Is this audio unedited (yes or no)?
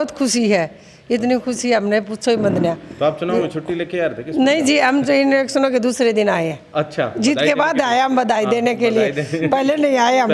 yes